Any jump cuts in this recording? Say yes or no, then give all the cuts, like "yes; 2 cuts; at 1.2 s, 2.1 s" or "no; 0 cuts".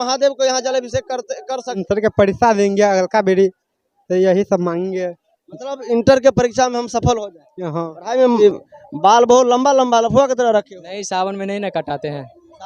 yes; 2 cuts; at 1.8 s, 8.4 s